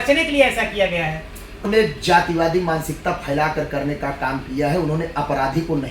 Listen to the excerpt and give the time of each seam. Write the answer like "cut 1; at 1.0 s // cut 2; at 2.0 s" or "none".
cut 1; at 1.7 s